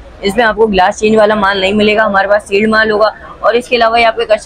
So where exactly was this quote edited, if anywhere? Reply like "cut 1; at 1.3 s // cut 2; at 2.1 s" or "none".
none